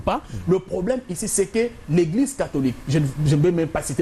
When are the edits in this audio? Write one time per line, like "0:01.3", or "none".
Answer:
none